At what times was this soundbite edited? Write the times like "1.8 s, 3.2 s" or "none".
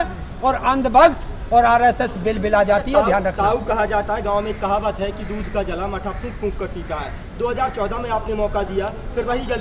none